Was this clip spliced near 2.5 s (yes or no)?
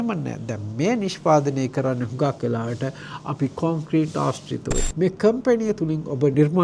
no